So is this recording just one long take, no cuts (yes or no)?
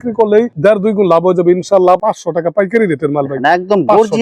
no